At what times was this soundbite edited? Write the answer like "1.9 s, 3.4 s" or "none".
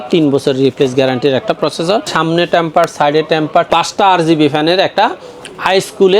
2.1 s

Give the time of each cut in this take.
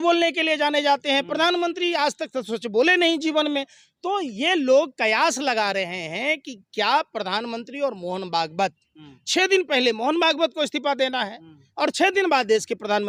none

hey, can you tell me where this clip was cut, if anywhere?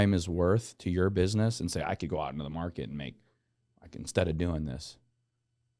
none

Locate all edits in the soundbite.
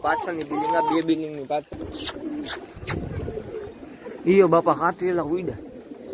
1.8 s

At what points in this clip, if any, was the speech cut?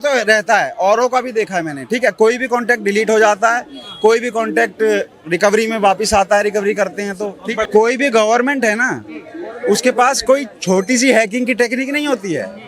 7.6 s

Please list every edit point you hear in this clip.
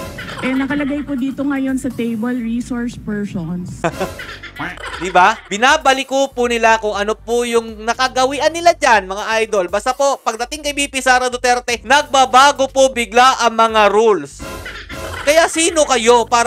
none

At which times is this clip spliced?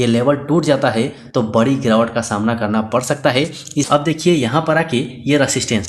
3.6 s

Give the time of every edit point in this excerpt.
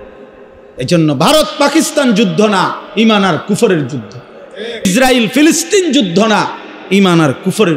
4.8 s

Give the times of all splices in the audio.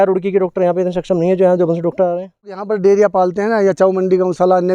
2.7 s

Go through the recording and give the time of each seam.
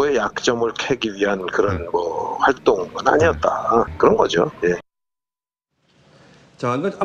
none

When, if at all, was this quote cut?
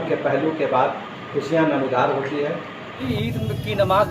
2.9 s

